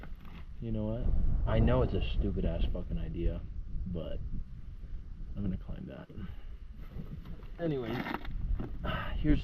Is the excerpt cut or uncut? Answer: uncut